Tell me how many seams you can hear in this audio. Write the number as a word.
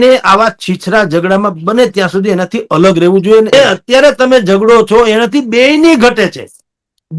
one